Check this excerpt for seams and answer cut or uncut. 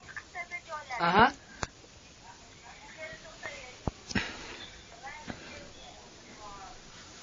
uncut